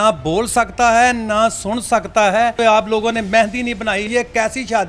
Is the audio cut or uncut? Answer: cut